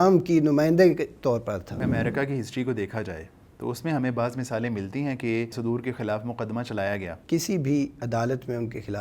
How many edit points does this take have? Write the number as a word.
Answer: three